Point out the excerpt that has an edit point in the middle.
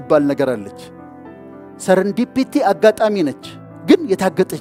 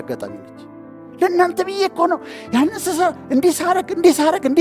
second; 1 cut; at 1.0 s

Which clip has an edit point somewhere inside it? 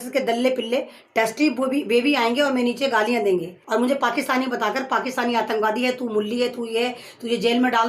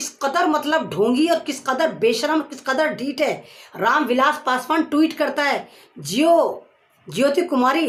first; 1 cut; at 3.6 s

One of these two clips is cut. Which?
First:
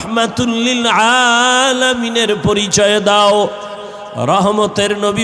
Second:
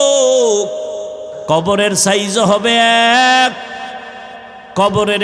second; 1 cut; at 1.3 s

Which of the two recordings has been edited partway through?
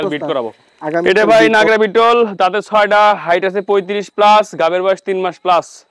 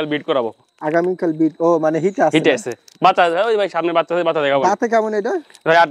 first; 1 cut; at 1.0 s

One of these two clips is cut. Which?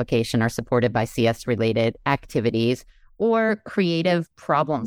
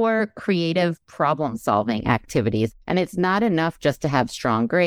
second; 1 cut; at 2.7 s

